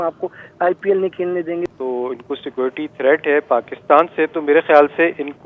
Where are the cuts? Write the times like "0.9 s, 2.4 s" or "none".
1.7 s